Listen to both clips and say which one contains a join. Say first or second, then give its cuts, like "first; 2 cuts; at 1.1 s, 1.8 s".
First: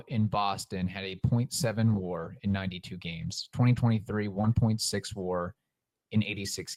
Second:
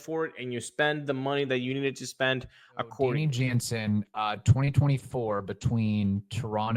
second; 1 cut; at 3.2 s